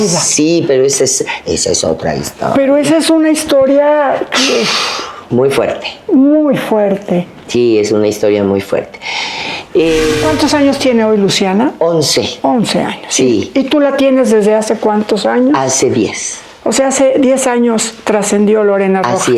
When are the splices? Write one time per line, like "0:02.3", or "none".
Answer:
0:10.2